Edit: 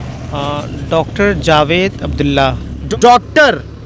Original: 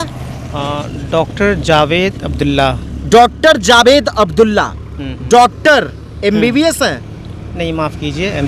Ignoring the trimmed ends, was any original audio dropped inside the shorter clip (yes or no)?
yes